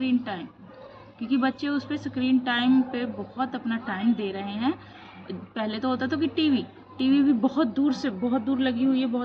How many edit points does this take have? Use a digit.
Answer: 0